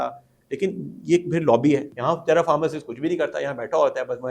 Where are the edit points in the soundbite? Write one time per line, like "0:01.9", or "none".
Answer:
0:01.9